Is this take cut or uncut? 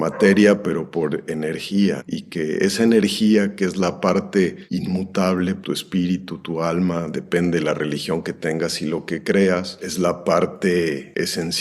cut